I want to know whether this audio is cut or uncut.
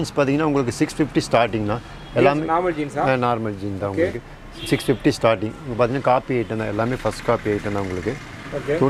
uncut